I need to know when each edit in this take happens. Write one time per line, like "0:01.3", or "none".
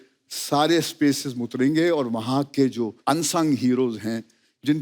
0:03.0